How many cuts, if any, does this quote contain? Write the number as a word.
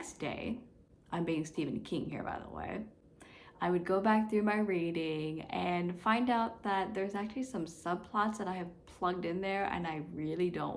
zero